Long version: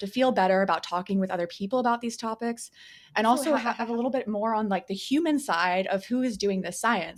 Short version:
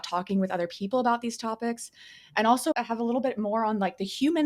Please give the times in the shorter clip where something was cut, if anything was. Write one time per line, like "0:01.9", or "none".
0:02.7